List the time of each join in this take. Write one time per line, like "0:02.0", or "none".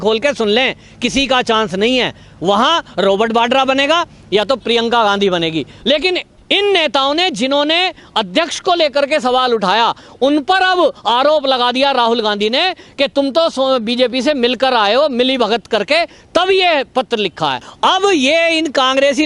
0:05.7
0:17.7